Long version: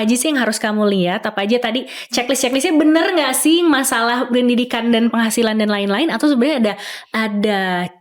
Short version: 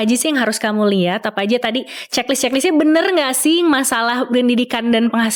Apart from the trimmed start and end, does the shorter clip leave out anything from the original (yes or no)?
no